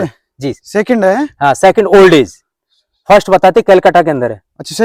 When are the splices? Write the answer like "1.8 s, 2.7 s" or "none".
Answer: none